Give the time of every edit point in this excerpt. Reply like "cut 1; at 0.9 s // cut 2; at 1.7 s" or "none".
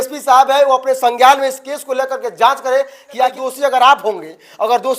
cut 1; at 3.4 s